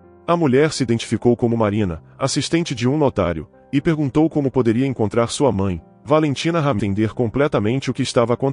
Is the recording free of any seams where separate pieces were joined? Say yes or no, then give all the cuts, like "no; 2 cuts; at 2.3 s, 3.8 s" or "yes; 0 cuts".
no; 1 cut; at 6.8 s